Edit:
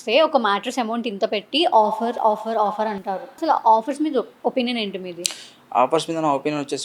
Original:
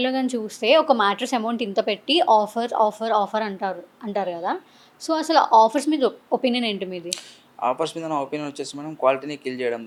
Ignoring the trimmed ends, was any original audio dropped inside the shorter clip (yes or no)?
yes